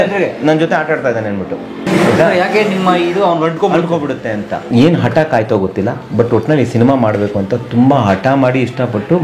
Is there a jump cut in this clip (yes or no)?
yes